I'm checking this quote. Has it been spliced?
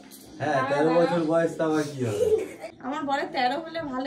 yes; 1 cut; at 2.7 s

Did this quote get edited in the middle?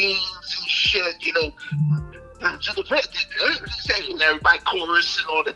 no; 0 cuts

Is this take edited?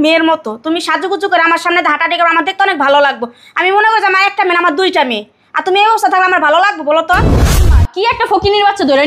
yes; 1 cut; at 7.7 s

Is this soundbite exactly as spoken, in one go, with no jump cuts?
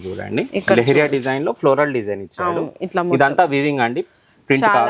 yes; 0 cuts

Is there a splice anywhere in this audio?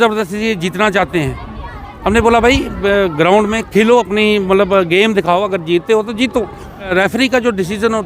yes; 1 cut; at 6.9 s

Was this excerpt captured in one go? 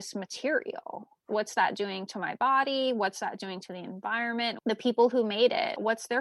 no; 2 cuts; at 1.2 s, 4.6 s

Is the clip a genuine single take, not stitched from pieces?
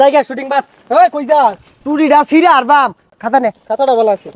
no; 1 cut; at 3.0 s

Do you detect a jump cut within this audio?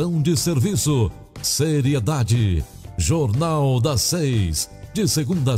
no; 0 cuts

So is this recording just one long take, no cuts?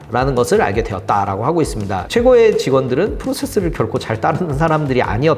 no; 1 cut; at 2.1 s

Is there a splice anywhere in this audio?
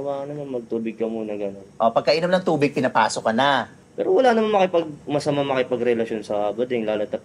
yes; 1 cut; at 3.8 s

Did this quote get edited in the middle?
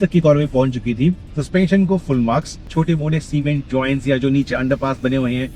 yes; 2 cuts; at 1.3 s, 2.7 s

